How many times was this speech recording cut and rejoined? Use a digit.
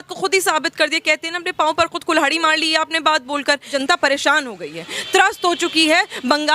1